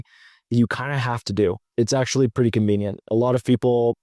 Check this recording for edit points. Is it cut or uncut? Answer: cut